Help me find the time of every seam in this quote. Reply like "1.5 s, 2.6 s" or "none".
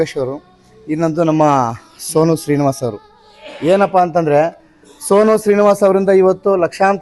none